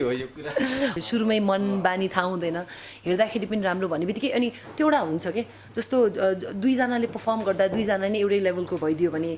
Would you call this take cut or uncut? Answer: cut